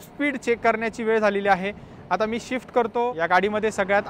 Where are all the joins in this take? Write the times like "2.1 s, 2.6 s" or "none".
3.1 s